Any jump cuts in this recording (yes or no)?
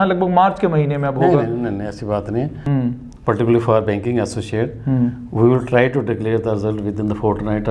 yes